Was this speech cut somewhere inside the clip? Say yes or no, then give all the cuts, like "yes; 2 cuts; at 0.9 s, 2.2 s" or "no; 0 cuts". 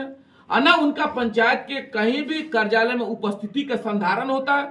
no; 0 cuts